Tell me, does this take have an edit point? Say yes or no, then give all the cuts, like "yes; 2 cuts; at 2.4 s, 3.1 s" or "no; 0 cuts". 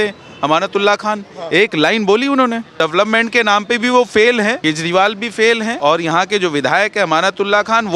yes; 3 cuts; at 2.7 s, 4.6 s, 5.7 s